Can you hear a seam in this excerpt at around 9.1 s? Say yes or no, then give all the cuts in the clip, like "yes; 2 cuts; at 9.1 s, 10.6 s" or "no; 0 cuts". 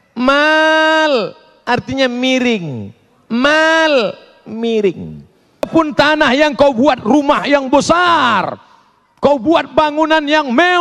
no; 1 cut; at 5.7 s